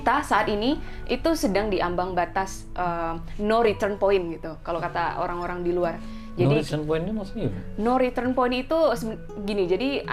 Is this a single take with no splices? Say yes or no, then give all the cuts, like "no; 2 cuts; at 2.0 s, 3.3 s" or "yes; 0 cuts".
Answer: yes; 0 cuts